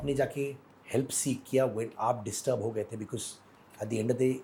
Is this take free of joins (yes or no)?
yes